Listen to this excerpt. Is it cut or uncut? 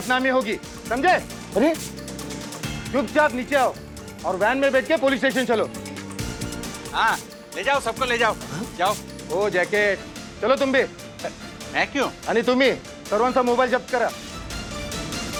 uncut